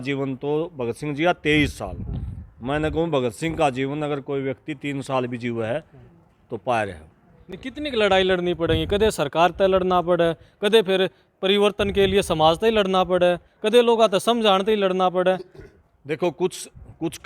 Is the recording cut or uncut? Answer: uncut